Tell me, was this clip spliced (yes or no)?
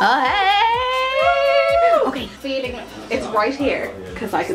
yes